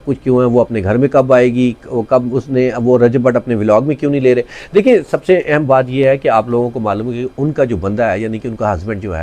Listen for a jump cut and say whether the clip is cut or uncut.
uncut